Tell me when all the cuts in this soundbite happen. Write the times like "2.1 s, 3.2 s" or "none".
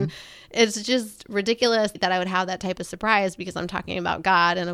none